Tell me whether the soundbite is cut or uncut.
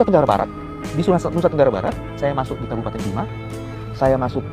uncut